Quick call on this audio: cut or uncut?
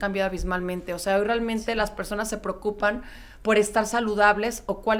uncut